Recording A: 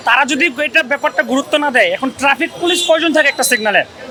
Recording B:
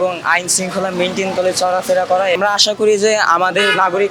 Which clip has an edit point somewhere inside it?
B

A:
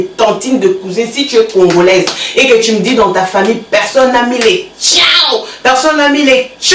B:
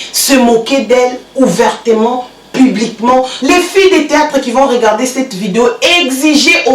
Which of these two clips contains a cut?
B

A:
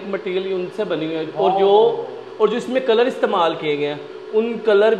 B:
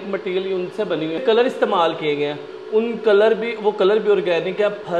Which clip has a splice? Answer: B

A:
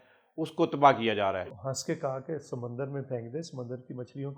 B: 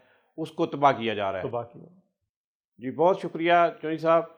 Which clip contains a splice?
A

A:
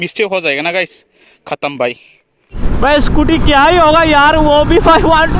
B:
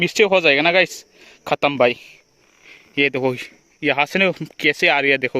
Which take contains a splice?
A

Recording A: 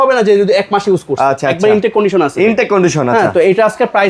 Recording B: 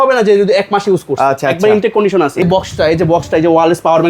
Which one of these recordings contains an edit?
B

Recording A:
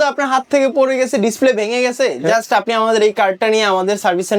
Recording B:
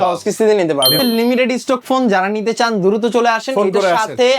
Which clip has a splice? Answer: B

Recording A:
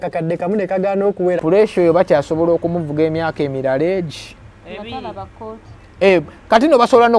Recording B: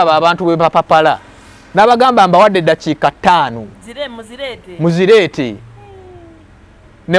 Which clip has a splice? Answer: A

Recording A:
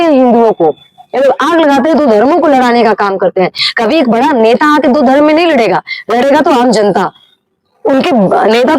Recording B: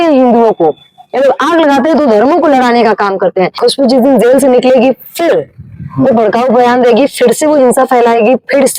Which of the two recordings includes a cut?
B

